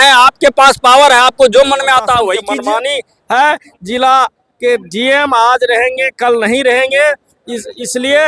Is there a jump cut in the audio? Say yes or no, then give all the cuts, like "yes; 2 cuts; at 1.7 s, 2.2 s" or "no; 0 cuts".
yes; 1 cut; at 2.4 s